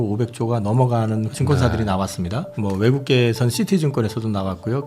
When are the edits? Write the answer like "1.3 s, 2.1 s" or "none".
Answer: 1.3 s